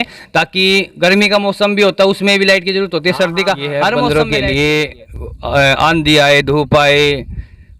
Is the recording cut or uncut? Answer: cut